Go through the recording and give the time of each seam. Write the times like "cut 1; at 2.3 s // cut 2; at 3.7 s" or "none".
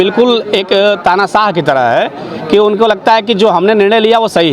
none